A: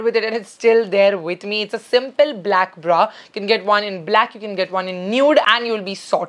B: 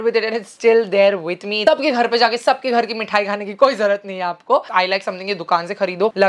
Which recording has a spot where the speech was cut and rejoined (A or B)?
B